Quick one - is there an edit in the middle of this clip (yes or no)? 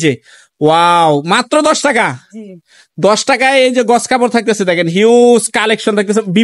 no